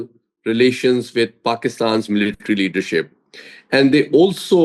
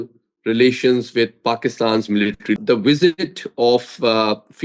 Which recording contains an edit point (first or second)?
second